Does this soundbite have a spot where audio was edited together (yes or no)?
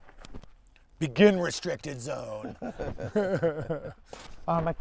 no